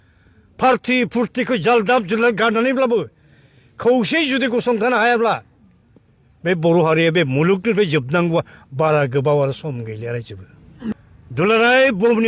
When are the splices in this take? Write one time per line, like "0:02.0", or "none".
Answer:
0:10.9

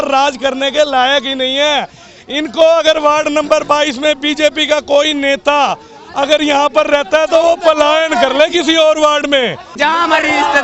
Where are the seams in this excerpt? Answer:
0:09.7

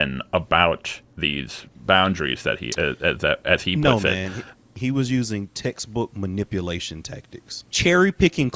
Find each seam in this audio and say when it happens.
0:04.7
0:07.6

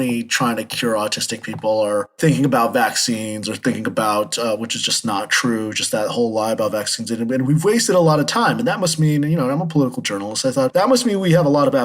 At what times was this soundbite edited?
0:02.1
0:10.7

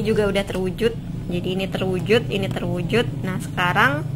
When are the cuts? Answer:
none

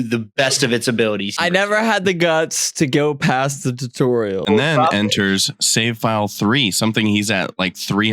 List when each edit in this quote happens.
0:01.4
0:04.4

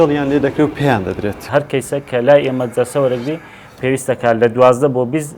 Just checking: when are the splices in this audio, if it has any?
0:01.4

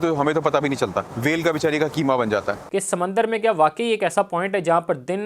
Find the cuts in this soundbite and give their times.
0:01.1
0:02.6

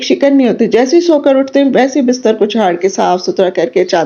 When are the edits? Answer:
none

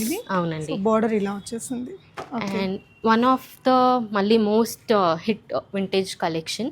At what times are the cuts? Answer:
none

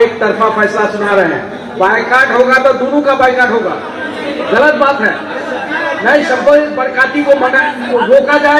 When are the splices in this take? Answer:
none

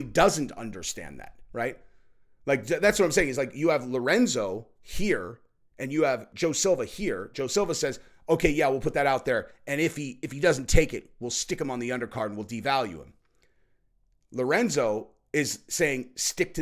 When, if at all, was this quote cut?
0:06.3

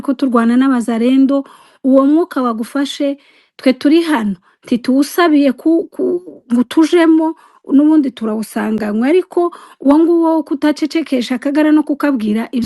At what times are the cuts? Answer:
none

